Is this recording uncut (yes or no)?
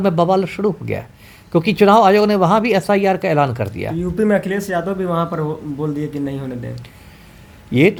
yes